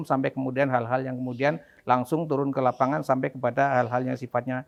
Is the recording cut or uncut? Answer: uncut